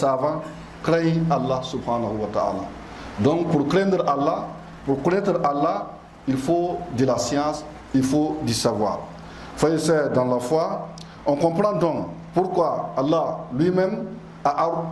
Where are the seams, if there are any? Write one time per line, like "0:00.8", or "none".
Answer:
none